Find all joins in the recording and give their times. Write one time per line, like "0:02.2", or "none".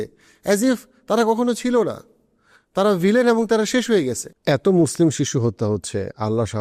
0:04.3